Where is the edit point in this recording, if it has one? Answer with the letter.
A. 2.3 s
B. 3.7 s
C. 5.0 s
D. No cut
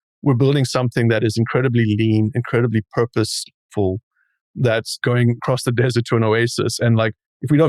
C